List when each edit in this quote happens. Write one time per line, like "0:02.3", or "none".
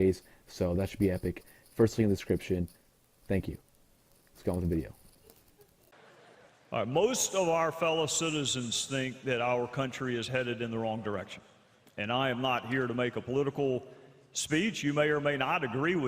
0:11.1